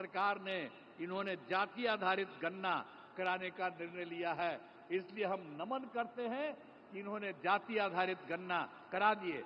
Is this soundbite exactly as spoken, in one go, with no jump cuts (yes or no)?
yes